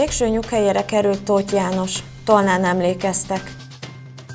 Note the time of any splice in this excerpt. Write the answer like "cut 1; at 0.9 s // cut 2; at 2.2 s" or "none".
cut 1; at 3.5 s